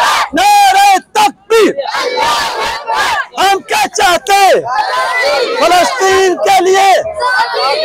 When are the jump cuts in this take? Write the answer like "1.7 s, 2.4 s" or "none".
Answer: none